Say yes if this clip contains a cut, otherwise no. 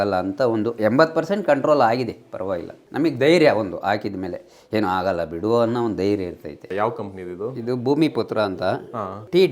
yes